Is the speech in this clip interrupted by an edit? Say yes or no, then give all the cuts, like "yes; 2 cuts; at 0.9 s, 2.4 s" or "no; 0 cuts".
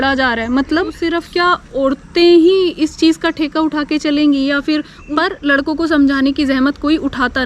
yes; 2 cuts; at 1.0 s, 4.9 s